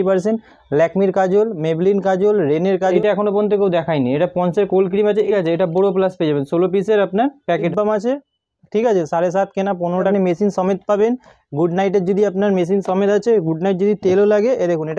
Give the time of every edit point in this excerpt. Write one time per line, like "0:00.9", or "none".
0:02.9
0:05.3
0:07.7
0:10.1

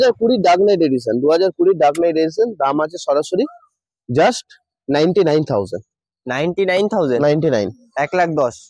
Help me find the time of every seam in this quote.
none

